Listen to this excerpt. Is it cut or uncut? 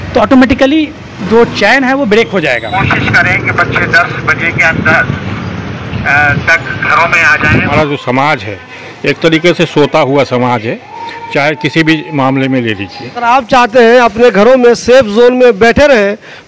cut